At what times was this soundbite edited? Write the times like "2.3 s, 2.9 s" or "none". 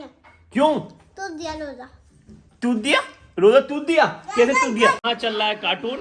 5.0 s